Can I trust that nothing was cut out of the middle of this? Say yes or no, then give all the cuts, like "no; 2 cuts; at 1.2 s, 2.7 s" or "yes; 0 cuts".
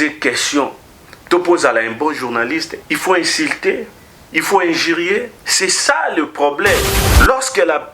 no; 3 cuts; at 2.8 s, 5.4 s, 7.0 s